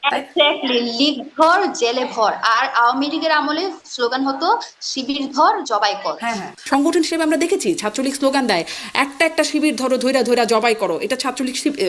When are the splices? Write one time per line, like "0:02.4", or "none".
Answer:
0:06.5